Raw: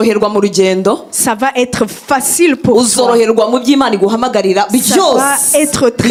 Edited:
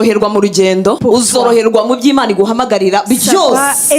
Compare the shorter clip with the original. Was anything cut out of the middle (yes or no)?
yes